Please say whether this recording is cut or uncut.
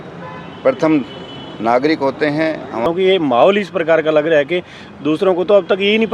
cut